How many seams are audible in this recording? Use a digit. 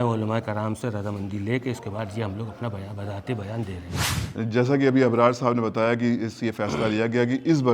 1